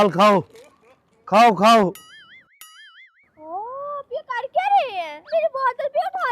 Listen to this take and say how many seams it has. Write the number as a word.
one